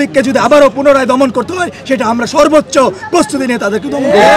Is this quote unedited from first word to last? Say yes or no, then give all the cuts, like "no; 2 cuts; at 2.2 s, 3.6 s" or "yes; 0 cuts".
yes; 0 cuts